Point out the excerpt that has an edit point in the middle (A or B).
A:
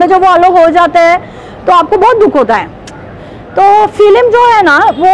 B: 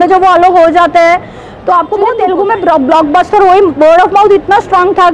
B